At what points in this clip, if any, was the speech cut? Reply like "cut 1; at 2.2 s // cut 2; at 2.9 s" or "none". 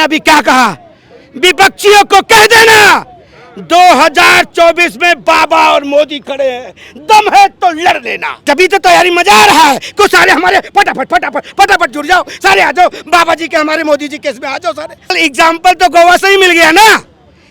cut 1; at 8.4 s // cut 2; at 15.2 s